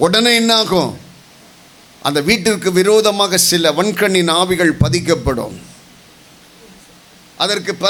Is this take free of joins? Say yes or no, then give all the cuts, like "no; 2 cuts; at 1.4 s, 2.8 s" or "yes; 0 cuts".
yes; 0 cuts